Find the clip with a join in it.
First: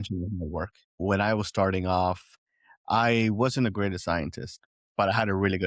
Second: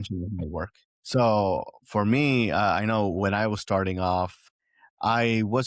first; 1 cut; at 1.0 s

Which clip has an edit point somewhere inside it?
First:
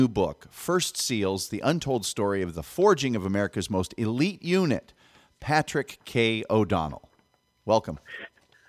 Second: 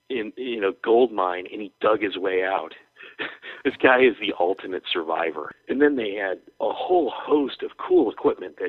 second; 1 cut; at 5.5 s

